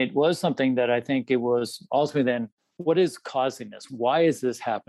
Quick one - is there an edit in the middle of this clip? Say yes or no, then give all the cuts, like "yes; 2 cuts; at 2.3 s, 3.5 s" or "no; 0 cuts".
yes; 2 cuts; at 2.5 s, 3.8 s